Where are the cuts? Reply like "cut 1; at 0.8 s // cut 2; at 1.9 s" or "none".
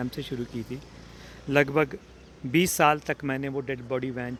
none

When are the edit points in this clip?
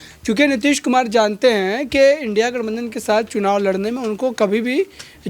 none

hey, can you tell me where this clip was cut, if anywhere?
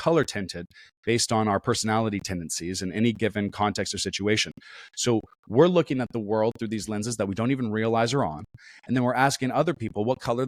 none

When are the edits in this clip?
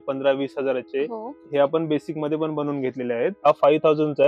cut 1; at 1.4 s // cut 2; at 3.4 s

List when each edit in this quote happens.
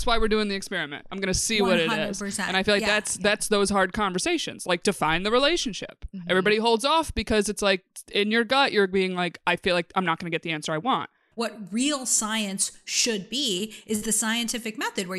cut 1; at 11.2 s

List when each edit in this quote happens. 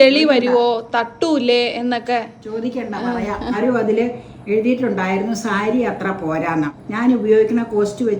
cut 1; at 3.6 s // cut 2; at 6.8 s

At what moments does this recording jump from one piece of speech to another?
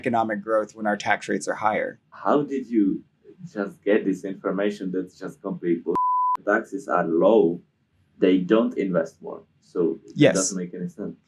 cut 1; at 2.1 s // cut 2; at 6.4 s

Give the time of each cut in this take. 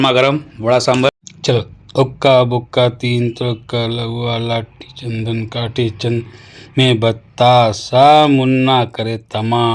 cut 1; at 1.1 s

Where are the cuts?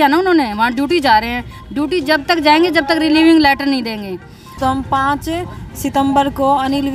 cut 1; at 4.6 s

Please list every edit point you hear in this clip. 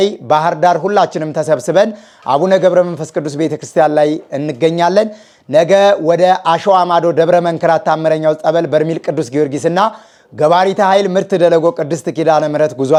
none

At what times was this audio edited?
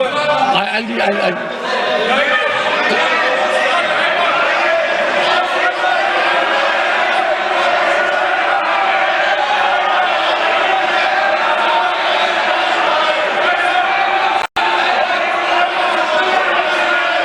none

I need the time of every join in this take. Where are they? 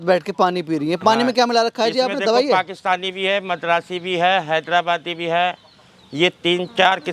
none

